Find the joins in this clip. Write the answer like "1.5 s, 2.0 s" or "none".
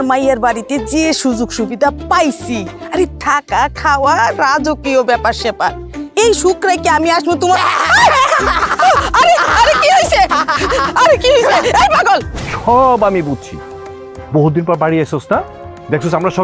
12.4 s